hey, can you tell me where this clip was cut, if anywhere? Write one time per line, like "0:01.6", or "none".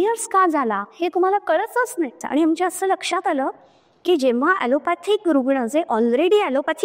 0:02.2

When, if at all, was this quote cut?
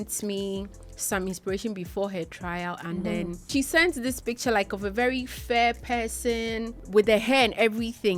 0:03.5
0:06.7

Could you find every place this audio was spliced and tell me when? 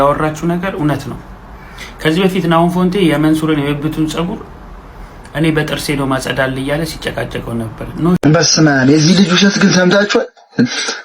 0:08.2

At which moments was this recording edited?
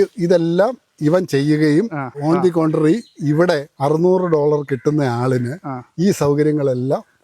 0:02.1
0:03.7

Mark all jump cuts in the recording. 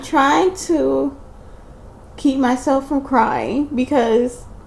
none

